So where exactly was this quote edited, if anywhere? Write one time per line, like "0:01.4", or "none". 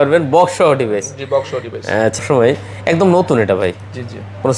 0:02.2